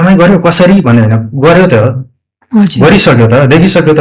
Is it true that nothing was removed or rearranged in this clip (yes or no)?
yes